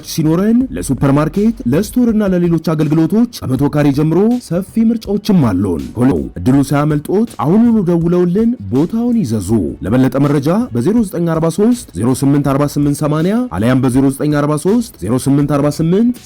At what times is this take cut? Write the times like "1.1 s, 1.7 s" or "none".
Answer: 6.1 s